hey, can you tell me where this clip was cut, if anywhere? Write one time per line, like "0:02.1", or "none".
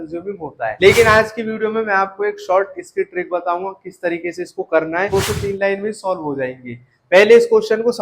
0:00.8
0:05.1

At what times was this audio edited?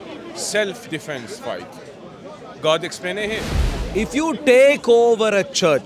0:03.5

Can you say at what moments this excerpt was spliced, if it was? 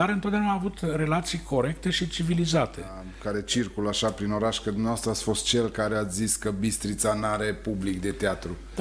0:03.1

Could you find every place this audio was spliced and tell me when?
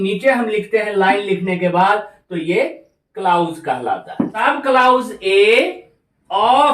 0:04.4

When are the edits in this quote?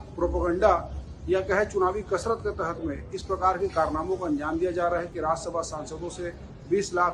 none

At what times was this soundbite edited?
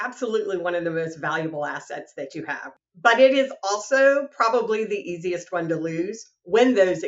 0:02.7

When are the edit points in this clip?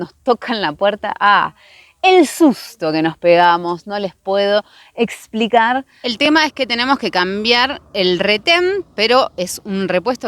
0:06.1

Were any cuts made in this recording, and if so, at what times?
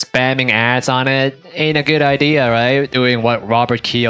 0:02.9

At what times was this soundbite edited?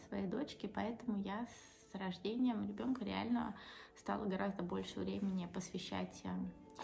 none

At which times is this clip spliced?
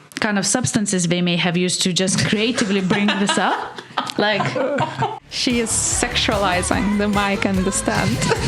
0:05.2

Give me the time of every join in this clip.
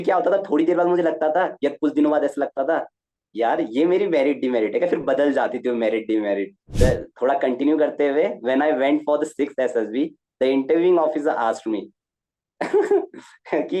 0:06.6

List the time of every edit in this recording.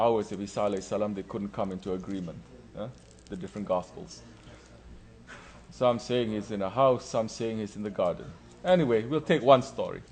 0:00.9

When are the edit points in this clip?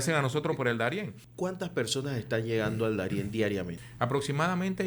0:01.2
0:03.8

